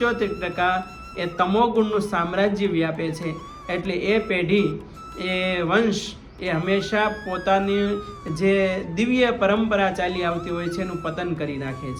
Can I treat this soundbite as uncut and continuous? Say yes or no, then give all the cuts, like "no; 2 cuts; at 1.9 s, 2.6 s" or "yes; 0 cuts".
yes; 0 cuts